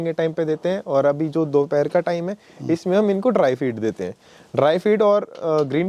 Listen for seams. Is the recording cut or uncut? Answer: uncut